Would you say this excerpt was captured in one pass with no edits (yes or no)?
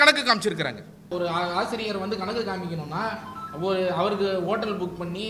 no